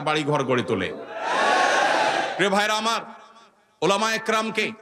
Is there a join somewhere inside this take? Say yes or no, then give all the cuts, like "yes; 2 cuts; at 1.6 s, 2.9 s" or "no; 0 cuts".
no; 0 cuts